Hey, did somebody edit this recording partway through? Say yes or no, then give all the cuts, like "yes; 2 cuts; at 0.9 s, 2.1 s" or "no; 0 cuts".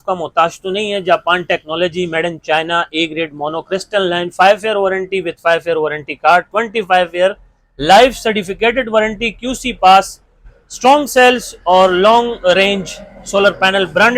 no; 0 cuts